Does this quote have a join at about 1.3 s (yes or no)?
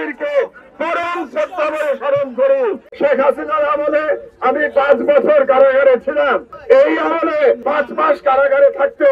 no